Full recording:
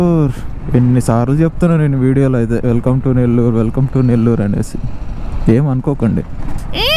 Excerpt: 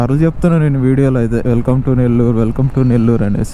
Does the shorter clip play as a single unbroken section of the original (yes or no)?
yes